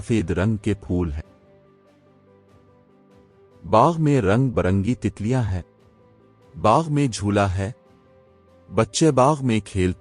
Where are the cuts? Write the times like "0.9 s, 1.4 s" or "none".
1.7 s, 3.6 s